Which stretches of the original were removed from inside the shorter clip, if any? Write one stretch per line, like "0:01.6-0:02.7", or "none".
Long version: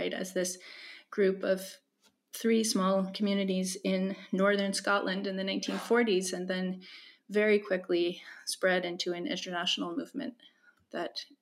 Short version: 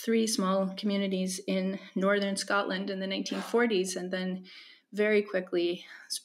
none